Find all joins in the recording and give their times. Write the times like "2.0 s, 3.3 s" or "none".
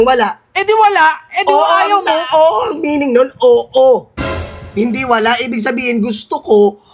none

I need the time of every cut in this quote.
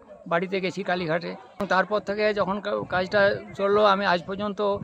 1.9 s

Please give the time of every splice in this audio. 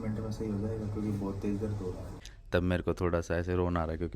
2.1 s

